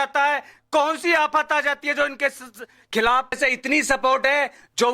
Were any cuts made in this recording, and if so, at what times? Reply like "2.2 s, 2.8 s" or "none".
3.4 s

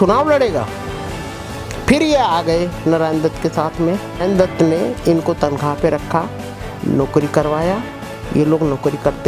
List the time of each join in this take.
4.2 s

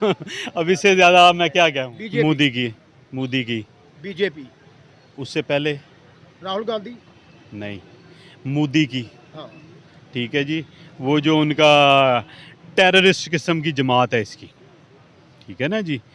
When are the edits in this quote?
1.9 s

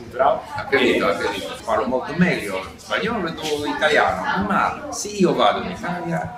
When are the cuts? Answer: 1.5 s

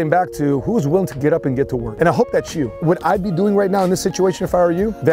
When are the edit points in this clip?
2.7 s

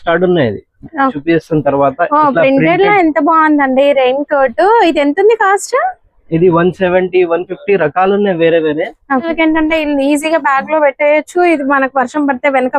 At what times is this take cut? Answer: 1.2 s, 9.3 s

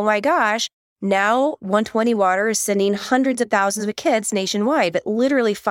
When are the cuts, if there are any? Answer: none

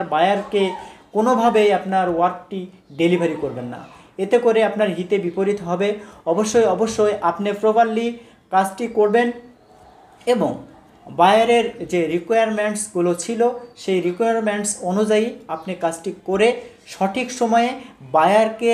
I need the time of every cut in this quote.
none

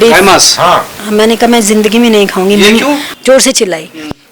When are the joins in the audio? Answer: 3.1 s

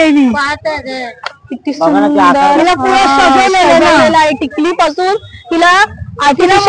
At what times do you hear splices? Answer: none

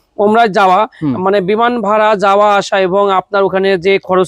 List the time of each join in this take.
none

